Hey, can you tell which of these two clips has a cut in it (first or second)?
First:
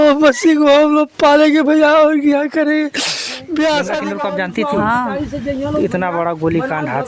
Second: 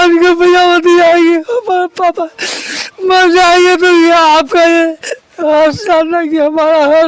first